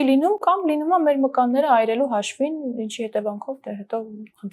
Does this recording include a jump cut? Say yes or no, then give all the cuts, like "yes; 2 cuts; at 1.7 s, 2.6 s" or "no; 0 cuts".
no; 0 cuts